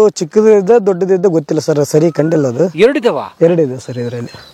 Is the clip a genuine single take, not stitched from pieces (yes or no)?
yes